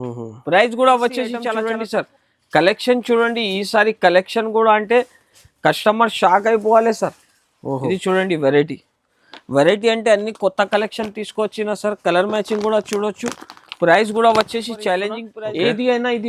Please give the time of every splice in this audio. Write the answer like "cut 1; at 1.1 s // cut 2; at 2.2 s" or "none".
cut 1; at 1.4 s // cut 2; at 15.2 s